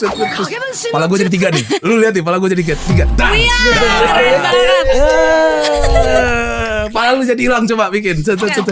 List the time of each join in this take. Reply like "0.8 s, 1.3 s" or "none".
none